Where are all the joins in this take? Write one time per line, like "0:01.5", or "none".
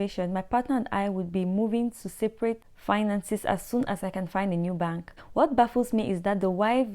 0:02.7
0:05.2